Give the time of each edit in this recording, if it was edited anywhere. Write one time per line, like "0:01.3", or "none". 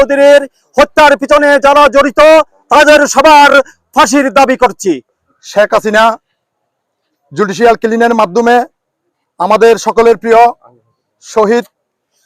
0:05.2